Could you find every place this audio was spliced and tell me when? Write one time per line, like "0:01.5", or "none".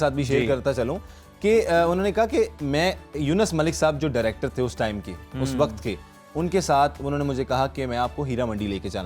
none